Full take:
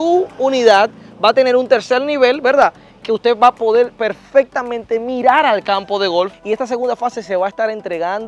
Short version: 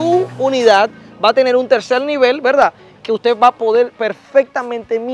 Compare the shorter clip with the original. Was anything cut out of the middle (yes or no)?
no